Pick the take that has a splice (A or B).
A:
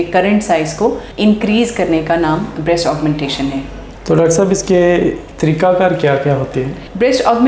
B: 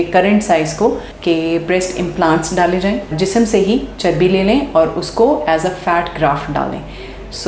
B